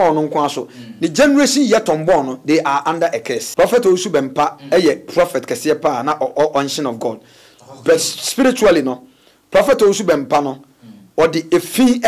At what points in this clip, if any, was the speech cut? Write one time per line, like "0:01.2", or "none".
0:03.4